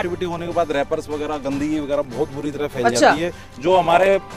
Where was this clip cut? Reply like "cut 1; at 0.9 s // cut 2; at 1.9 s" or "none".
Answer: none